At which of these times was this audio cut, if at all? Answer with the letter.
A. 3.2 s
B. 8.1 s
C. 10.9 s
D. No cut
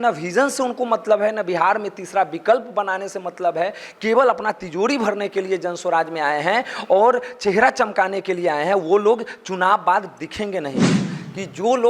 C